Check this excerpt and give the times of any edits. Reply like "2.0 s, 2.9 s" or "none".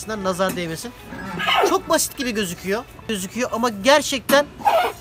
3.2 s